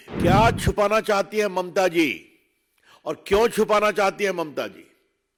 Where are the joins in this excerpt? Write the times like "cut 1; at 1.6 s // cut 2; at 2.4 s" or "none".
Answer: none